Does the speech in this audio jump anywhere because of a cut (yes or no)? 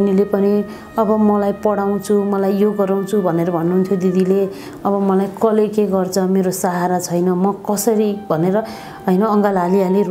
no